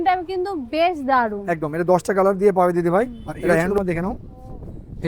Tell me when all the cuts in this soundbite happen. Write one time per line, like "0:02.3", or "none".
0:03.8